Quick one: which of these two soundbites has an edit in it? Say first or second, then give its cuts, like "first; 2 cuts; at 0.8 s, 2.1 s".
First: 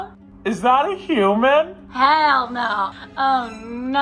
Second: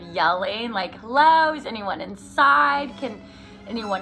first; 1 cut; at 1.8 s